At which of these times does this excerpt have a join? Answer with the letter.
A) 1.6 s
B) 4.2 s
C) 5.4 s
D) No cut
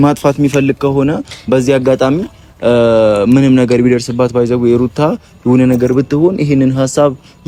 D